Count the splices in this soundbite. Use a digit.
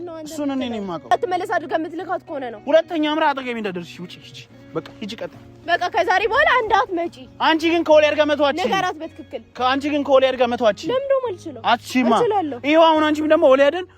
1